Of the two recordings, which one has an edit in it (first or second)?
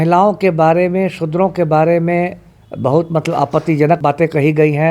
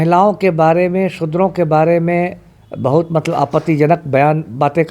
first